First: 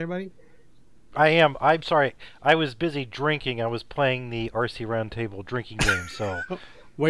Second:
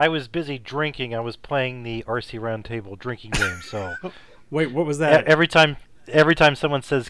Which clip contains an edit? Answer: first; 1 cut; at 1.1 s

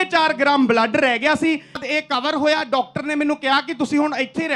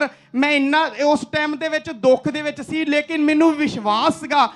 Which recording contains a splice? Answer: first; 1 cut; at 1.8 s

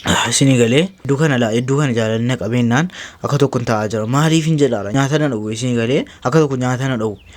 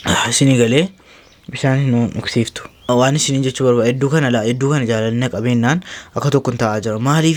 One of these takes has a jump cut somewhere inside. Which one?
first; 2 cuts; at 1.0 s, 4.9 s

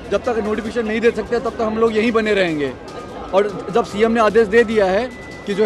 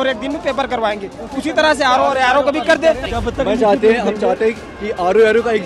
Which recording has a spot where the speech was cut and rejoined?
second; 1 cut; at 3.1 s

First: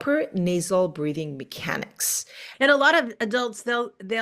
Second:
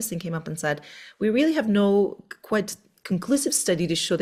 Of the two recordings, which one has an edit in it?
first; 1 cut; at 2.4 s

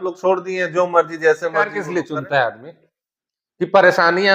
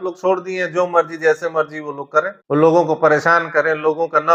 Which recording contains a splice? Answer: first; 1 cut; at 1.8 s

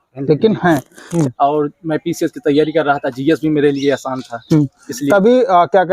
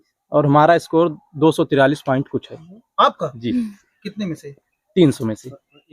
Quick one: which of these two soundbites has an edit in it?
first; 1 cut; at 1.0 s

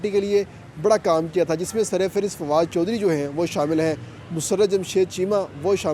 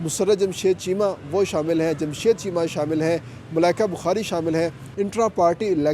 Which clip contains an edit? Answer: second; 1 cut; at 4.8 s

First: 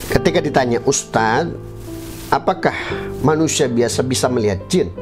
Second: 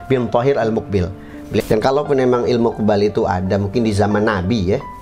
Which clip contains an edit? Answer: second; 1 cut; at 1.6 s

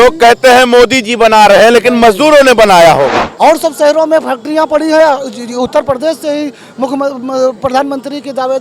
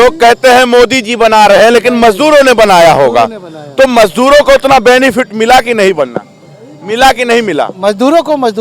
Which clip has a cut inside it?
first; 1 cut; at 3.2 s

